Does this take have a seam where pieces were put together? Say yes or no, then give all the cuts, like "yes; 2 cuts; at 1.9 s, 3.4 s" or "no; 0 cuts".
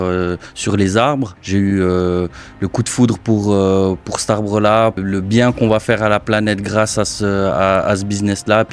yes; 2 cuts; at 1.4 s, 5.0 s